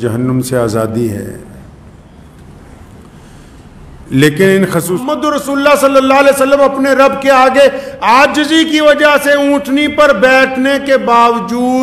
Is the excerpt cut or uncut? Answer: cut